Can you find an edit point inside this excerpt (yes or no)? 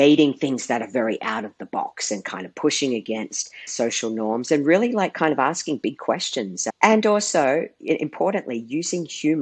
no